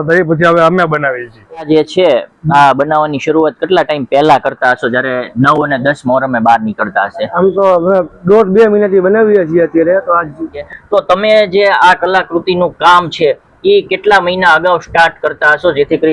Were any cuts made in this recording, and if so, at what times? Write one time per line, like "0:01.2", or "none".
0:01.7
0:10.6